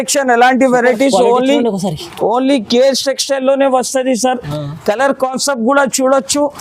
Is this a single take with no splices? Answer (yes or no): yes